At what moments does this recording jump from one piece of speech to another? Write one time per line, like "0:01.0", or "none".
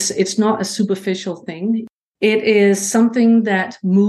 0:01.9